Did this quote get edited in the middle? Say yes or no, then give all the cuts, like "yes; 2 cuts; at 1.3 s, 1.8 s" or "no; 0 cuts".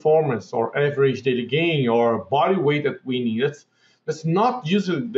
no; 0 cuts